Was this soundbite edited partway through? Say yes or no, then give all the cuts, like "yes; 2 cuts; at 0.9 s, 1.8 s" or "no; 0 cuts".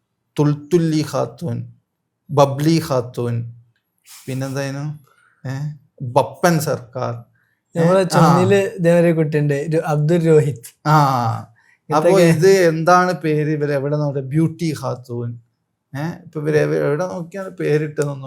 no; 0 cuts